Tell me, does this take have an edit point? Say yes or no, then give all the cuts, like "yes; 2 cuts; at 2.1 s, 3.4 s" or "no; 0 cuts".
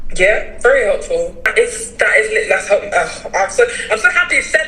yes; 1 cut; at 1.5 s